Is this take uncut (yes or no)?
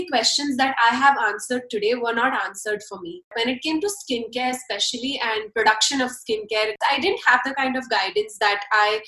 no